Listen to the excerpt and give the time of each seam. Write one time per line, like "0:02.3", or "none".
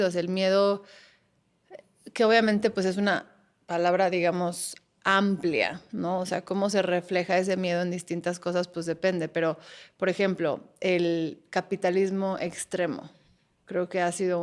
none